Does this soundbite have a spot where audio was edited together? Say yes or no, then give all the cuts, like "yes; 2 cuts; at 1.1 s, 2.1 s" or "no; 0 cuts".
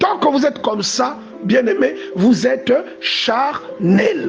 yes; 1 cut; at 2.0 s